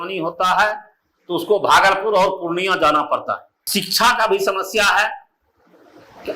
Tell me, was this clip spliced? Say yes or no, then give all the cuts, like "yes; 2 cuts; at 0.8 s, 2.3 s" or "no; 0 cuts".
yes; 1 cut; at 3.5 s